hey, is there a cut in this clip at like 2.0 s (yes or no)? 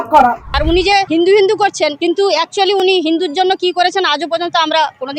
yes